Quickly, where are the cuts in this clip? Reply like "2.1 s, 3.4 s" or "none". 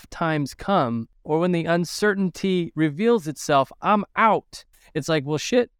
1.1 s, 4.7 s